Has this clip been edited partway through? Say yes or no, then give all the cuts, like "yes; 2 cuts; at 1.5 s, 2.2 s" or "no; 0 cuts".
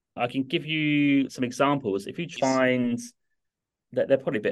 yes; 1 cut; at 2.3 s